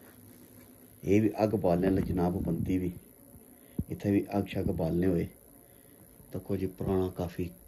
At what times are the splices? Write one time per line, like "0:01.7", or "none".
none